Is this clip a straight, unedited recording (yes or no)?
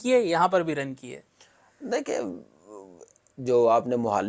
yes